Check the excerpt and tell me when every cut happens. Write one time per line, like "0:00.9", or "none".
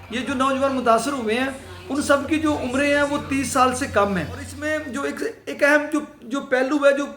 0:04.6